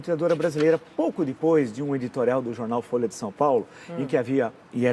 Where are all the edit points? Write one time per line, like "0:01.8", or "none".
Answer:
0:00.9